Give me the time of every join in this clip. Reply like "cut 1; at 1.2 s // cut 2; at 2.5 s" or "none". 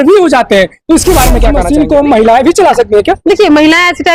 cut 1; at 1.6 s